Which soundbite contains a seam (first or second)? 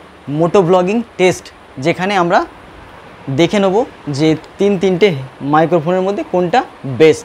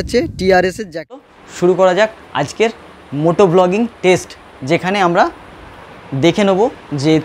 second